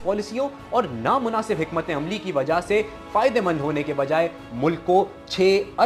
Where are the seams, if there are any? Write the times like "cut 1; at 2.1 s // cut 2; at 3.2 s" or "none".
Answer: none